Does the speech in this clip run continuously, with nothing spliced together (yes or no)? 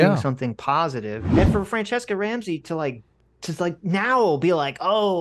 no